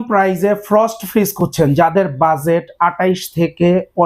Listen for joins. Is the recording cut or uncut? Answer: uncut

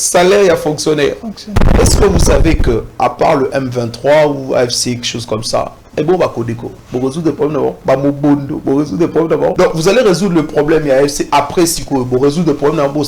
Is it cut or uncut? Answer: cut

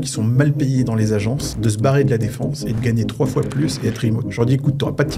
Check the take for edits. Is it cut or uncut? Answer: cut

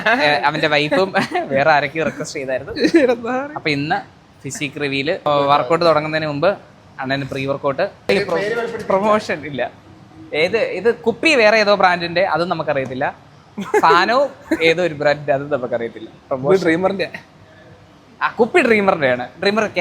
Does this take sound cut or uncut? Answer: cut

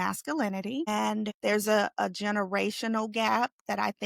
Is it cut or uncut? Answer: cut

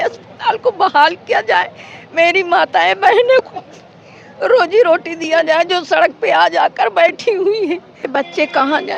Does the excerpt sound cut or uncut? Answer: cut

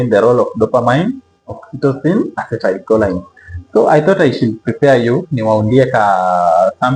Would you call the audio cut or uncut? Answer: uncut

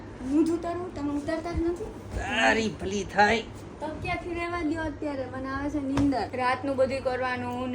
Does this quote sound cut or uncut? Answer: cut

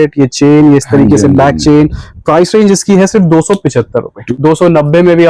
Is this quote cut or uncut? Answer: cut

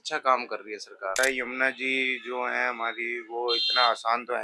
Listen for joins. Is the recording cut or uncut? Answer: cut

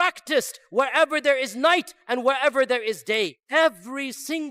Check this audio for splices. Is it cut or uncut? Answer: cut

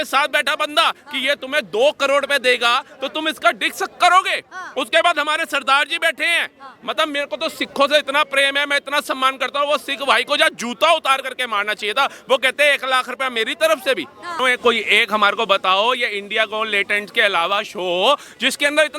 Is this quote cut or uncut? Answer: cut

